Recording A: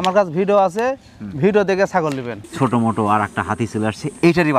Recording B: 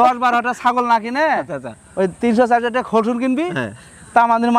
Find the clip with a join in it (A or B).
A